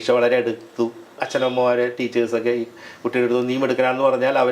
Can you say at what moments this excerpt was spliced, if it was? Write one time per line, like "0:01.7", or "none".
0:01.2